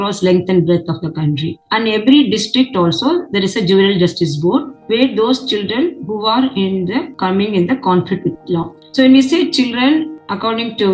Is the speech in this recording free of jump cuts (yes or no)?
yes